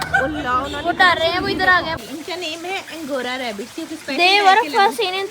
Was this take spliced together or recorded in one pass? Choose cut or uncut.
cut